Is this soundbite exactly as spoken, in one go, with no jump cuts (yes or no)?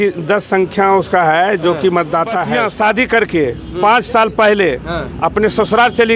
no